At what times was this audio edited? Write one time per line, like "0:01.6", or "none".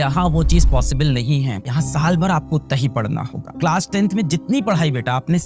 0:01.6
0:03.6